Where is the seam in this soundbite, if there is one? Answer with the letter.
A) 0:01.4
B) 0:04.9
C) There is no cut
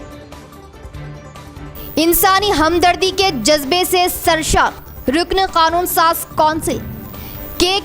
A